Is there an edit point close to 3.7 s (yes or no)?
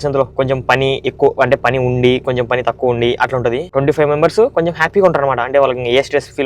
yes